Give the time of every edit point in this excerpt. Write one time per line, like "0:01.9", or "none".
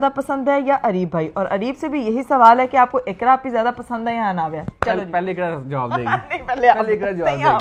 none